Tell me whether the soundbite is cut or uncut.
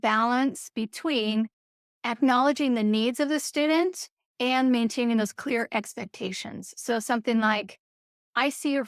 uncut